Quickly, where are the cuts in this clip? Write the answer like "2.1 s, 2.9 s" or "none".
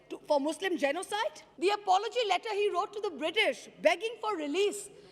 1.4 s